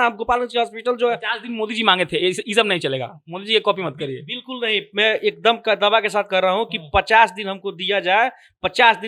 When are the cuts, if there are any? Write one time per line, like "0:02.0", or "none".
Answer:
none